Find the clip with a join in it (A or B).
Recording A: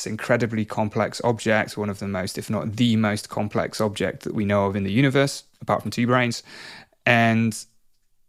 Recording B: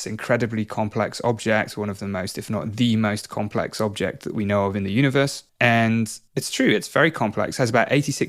B